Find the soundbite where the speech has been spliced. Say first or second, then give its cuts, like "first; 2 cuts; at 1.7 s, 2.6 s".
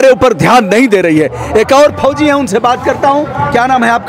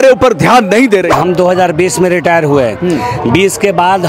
second; 1 cut; at 1.1 s